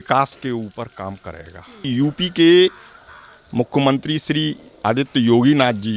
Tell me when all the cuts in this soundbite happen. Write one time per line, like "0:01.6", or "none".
0:01.8
0:04.7